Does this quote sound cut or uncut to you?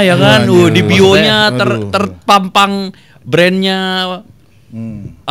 uncut